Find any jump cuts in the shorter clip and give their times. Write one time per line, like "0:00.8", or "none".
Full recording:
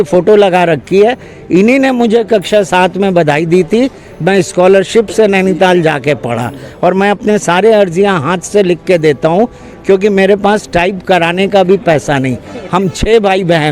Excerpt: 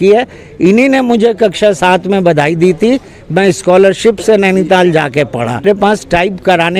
0:05.6